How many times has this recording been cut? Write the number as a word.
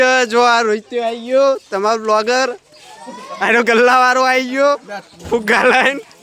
zero